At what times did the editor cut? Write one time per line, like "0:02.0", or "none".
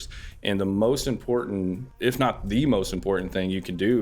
0:01.9